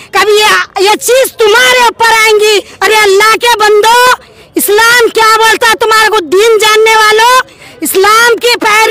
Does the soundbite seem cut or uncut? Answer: cut